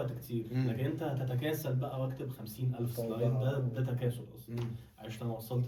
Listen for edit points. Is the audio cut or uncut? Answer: uncut